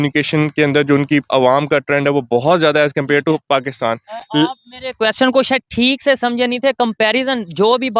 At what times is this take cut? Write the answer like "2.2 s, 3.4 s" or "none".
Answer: none